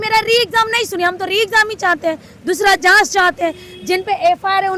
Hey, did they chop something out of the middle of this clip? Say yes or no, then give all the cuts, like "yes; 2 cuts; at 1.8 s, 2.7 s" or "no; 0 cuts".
no; 0 cuts